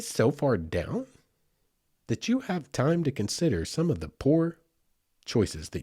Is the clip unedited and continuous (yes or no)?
yes